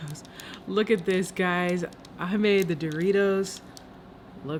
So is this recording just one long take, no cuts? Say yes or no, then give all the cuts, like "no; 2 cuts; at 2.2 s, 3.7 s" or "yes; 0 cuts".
yes; 0 cuts